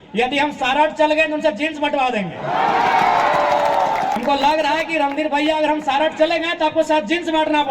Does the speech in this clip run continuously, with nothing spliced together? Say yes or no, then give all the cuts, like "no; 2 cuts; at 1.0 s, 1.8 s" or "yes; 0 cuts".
no; 1 cut; at 4.2 s